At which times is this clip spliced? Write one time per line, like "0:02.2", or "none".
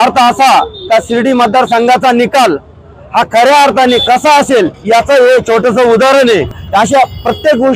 none

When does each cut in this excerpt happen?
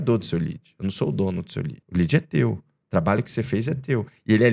0:01.8

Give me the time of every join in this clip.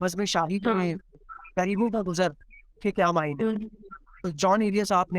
0:04.2

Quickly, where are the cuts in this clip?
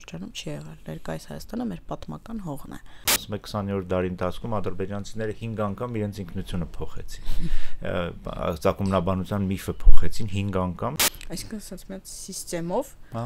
0:03.2
0:10.9

